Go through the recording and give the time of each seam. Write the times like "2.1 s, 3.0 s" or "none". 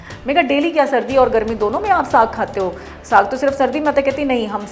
none